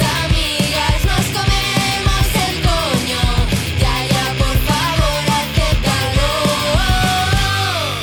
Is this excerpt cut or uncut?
uncut